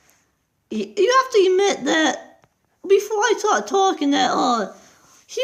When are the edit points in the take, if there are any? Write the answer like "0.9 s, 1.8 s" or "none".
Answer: none